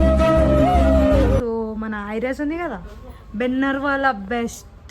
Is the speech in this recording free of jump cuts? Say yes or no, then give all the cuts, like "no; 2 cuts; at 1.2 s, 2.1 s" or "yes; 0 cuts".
no; 1 cut; at 1.4 s